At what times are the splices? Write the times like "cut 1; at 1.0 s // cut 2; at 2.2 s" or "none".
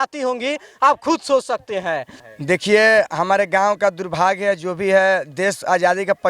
cut 1; at 2.1 s